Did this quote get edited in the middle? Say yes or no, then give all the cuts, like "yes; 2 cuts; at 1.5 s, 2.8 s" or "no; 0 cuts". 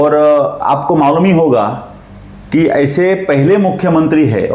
no; 0 cuts